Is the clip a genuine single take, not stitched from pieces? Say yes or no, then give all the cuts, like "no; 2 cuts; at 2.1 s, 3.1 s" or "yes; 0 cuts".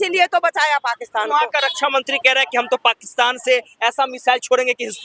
yes; 0 cuts